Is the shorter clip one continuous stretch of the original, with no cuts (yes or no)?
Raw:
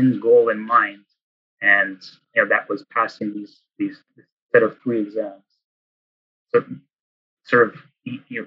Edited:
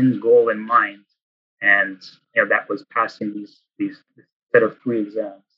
yes